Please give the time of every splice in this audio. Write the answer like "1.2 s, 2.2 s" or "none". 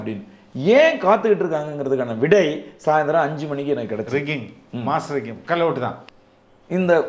6.0 s